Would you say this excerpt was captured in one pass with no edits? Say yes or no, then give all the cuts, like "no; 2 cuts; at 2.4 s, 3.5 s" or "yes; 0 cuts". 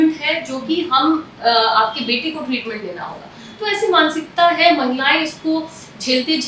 yes; 0 cuts